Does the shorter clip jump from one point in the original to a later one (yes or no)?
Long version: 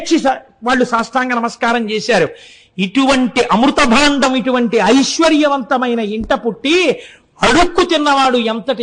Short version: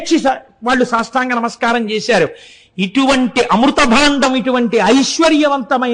no